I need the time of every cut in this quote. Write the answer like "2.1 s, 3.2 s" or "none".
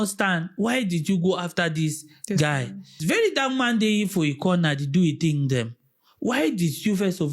3.0 s